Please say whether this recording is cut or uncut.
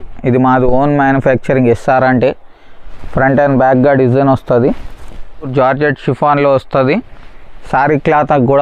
cut